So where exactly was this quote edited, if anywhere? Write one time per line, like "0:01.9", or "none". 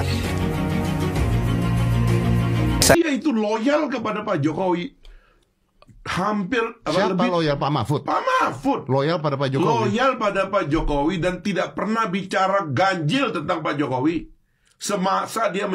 0:02.9